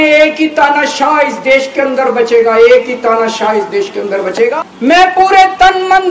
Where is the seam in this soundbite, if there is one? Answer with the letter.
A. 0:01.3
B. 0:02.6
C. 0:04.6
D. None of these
C